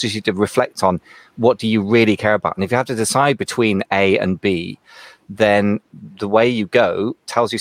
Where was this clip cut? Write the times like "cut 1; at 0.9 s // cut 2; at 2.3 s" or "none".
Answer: none